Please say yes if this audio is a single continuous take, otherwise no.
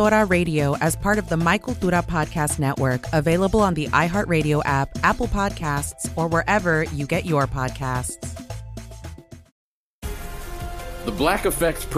no